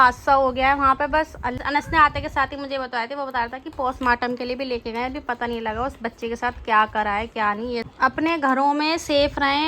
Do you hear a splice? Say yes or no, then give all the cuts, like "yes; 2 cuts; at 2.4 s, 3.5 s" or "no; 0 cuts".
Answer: yes; 2 cuts; at 1.6 s, 7.9 s